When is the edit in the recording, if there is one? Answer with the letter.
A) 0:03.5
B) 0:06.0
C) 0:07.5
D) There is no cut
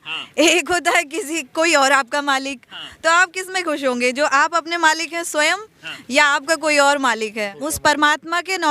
C